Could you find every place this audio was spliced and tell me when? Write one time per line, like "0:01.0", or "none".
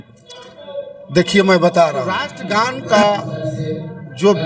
0:02.3